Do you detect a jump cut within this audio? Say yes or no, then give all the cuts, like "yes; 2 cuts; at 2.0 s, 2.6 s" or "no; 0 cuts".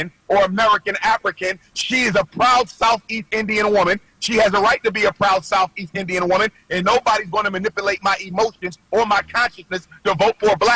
no; 0 cuts